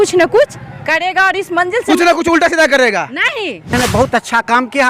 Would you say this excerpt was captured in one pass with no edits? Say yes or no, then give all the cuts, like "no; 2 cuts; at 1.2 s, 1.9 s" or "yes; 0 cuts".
no; 1 cut; at 3.7 s